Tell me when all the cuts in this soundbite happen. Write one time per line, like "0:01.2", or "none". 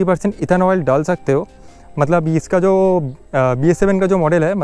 none